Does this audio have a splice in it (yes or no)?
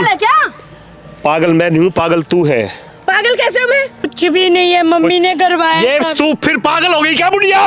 yes